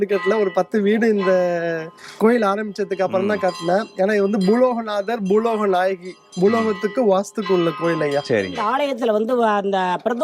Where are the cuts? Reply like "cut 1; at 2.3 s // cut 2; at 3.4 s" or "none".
cut 1; at 8.6 s